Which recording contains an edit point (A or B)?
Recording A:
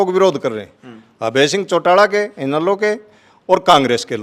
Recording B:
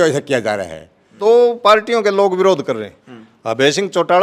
B